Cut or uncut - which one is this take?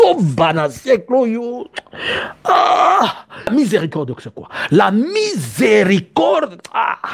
cut